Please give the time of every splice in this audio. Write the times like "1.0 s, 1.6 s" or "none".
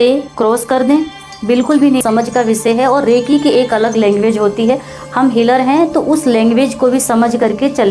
2.0 s